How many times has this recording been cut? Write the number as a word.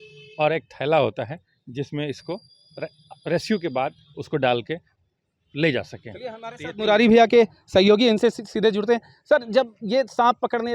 zero